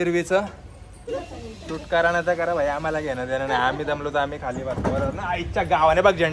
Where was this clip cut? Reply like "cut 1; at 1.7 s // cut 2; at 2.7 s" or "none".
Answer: cut 1; at 1.0 s